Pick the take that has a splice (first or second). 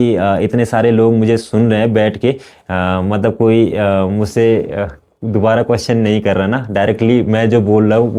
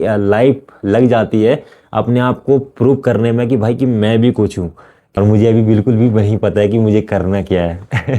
second